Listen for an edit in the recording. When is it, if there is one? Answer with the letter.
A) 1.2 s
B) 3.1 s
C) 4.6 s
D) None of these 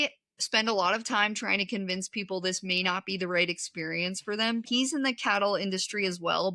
C